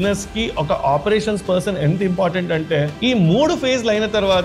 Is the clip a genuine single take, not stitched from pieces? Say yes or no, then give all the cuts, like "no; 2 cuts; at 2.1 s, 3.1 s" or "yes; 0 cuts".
no; 1 cut; at 2.9 s